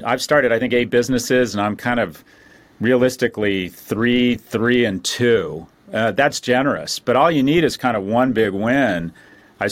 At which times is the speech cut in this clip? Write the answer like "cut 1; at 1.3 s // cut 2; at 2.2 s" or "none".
none